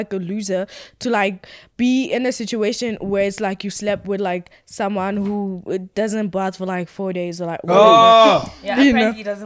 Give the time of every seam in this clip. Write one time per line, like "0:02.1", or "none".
none